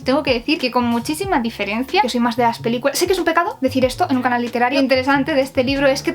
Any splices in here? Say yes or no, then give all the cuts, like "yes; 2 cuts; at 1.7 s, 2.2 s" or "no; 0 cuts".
yes; 2 cuts; at 2.0 s, 4.7 s